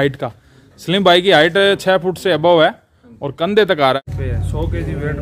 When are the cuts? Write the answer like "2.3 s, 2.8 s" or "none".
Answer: 4.0 s